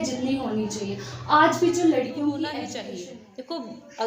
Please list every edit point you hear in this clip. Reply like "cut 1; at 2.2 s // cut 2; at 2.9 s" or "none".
cut 1; at 2.8 s